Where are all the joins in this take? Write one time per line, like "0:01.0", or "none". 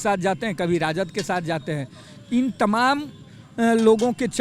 none